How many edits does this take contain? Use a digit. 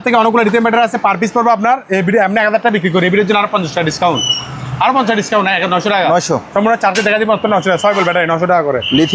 0